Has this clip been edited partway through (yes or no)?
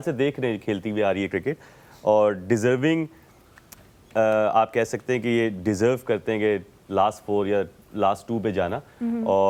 no